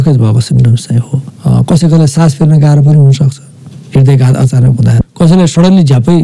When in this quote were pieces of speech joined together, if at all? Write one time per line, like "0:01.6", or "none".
0:01.2
0:05.0